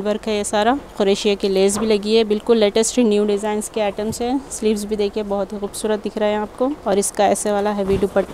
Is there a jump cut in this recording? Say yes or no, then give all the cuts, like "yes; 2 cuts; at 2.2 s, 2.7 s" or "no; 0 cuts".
yes; 2 cuts; at 0.9 s, 6.8 s